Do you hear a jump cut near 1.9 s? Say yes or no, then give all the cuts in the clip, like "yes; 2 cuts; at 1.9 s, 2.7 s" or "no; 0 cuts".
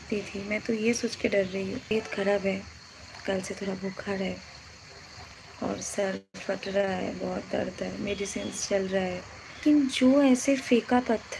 yes; 2 cuts; at 1.9 s, 9.6 s